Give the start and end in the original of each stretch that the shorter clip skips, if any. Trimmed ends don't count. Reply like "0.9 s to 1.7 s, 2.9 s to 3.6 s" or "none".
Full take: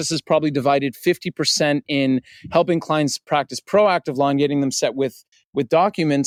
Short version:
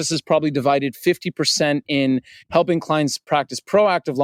none

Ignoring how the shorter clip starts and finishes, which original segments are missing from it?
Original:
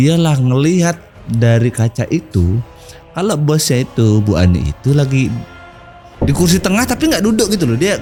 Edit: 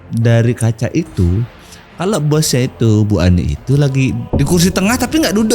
5.4 s to 6.1 s

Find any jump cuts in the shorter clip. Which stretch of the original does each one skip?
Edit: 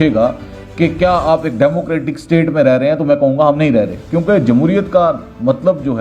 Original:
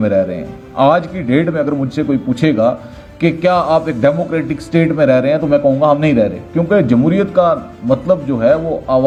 none

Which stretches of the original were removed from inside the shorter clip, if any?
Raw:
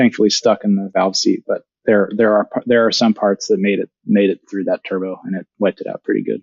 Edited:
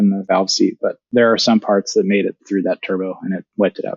1.7 s to 2.6 s, 4.0 s to 4.4 s

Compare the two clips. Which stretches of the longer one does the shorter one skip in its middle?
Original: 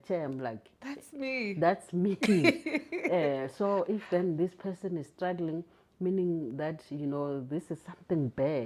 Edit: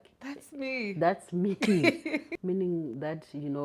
2.9 s to 5.9 s

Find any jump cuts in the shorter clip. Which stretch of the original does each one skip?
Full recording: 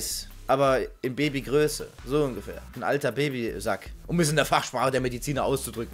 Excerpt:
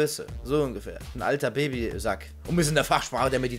none

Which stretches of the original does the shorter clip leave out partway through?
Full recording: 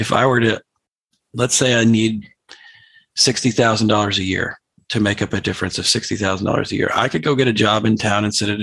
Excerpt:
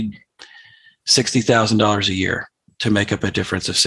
none

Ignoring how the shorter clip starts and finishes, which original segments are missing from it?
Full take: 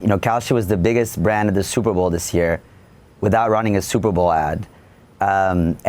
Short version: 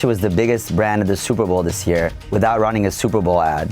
2.7 s to 3.1 s

